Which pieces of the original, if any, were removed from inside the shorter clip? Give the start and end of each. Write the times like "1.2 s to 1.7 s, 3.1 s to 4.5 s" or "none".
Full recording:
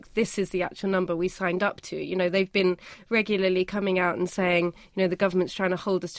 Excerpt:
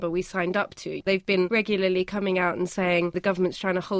2.2 s to 2.7 s, 4.8 s to 5.1 s